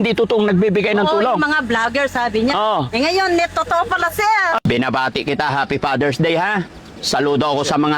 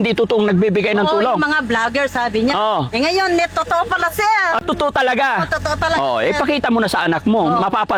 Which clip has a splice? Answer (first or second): first